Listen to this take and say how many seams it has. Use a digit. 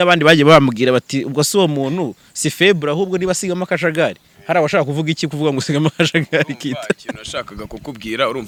0